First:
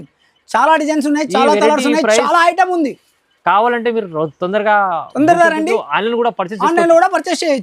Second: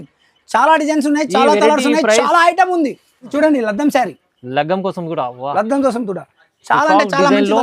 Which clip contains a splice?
second; 1 cut; at 3.3 s

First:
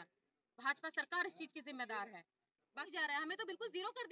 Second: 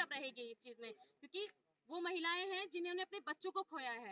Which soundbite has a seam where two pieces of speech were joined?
first; 1 cut; at 2.9 s

